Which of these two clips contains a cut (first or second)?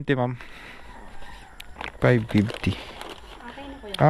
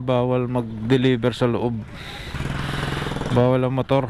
first